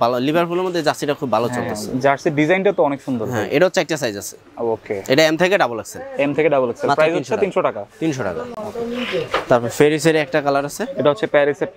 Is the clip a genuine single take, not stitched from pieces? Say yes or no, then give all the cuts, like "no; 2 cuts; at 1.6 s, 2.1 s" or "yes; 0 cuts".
yes; 0 cuts